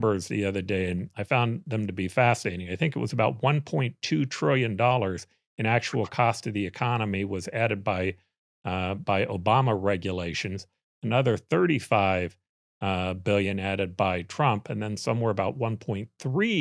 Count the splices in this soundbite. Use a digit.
0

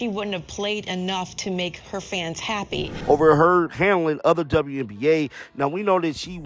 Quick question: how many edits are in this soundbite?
1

